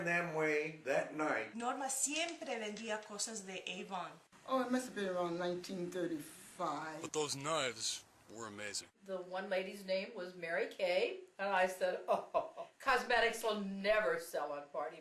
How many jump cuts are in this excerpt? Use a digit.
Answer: 0